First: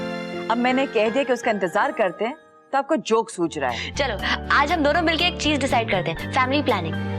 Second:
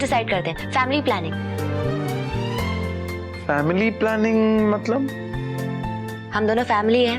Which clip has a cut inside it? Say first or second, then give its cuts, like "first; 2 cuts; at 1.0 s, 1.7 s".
first; 1 cut; at 3.8 s